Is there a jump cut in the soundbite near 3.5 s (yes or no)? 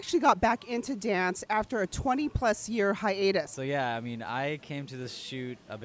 yes